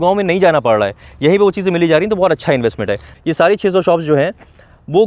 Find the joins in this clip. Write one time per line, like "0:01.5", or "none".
0:03.1